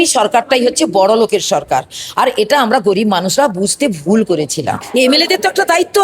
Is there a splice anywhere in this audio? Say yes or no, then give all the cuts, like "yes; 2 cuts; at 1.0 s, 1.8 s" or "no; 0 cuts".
yes; 1 cut; at 4.8 s